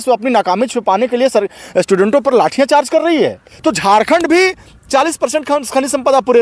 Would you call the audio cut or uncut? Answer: cut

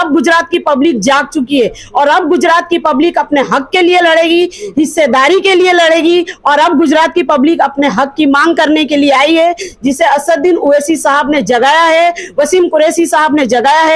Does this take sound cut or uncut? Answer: uncut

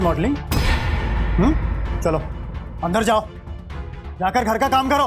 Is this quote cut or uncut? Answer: uncut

